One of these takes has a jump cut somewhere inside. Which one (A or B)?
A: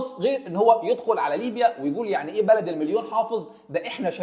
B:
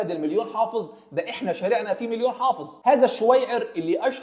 B